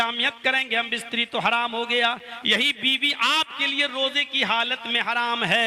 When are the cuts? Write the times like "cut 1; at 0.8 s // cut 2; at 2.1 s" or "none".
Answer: none